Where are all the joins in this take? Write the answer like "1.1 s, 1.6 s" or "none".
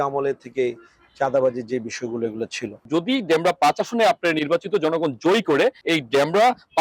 2.9 s, 5.8 s